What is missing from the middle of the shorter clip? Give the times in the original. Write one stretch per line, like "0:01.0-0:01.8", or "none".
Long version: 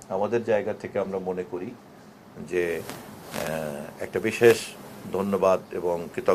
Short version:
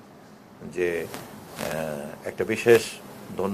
none